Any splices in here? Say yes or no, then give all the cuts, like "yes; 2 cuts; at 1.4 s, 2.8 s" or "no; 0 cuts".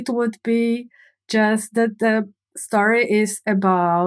no; 0 cuts